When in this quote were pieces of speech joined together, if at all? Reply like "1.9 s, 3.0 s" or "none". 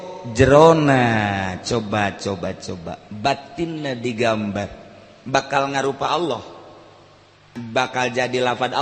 7.6 s